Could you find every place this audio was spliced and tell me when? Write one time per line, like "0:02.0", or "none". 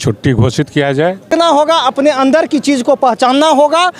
0:01.3

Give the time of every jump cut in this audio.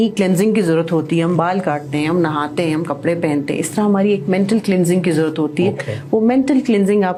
none

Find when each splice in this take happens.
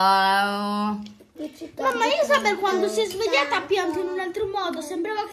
none

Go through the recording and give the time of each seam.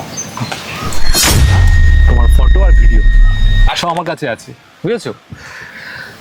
none

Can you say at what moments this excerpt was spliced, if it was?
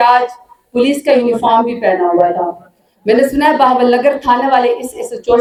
none

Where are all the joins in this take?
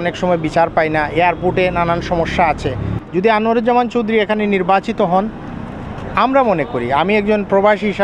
none

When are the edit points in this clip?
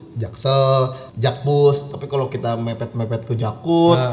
0:01.0

